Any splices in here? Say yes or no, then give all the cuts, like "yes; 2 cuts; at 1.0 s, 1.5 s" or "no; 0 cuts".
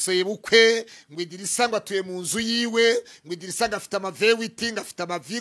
no; 0 cuts